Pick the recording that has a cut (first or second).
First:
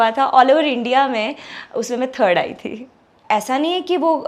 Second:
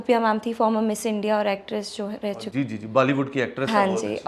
first